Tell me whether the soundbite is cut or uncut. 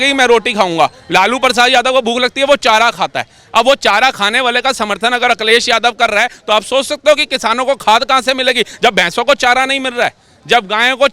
uncut